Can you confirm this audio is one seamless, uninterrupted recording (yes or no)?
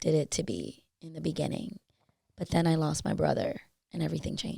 yes